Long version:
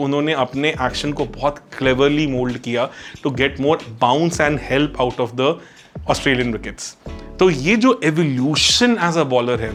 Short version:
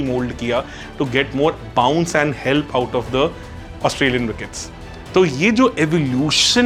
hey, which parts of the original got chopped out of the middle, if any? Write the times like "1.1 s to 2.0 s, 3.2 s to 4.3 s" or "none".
none